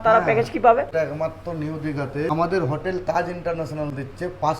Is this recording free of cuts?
no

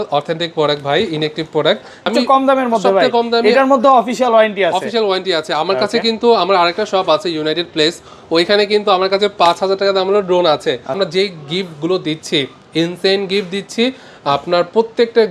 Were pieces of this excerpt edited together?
yes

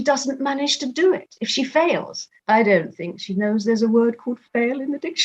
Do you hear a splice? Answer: yes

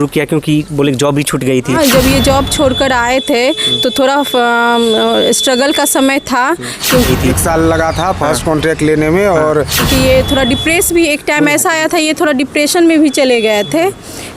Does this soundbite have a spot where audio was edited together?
yes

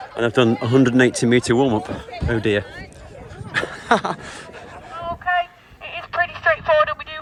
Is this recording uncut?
yes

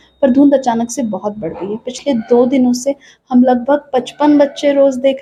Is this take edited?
no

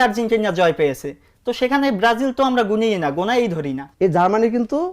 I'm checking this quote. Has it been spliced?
yes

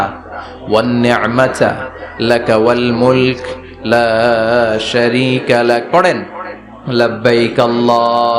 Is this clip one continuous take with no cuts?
yes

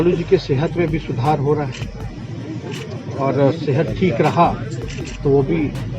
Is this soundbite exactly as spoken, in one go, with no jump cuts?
yes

